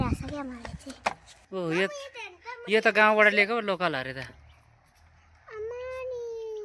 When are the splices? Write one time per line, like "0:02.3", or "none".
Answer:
0:01.3